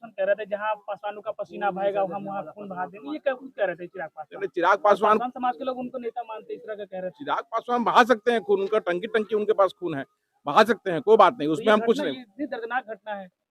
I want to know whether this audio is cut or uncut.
uncut